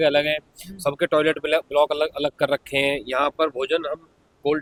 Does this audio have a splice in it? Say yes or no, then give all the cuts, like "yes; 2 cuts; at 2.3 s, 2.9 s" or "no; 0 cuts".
no; 0 cuts